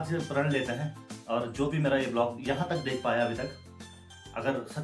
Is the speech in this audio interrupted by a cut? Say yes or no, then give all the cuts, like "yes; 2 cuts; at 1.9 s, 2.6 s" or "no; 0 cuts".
no; 0 cuts